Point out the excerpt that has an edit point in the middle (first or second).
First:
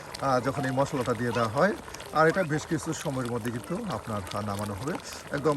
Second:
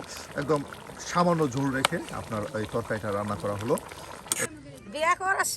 second